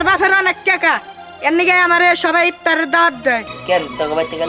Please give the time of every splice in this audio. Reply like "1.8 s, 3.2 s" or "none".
3.5 s